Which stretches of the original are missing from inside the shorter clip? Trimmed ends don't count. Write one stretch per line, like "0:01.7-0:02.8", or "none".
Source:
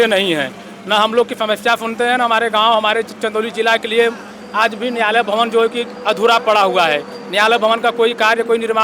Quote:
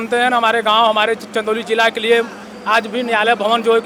none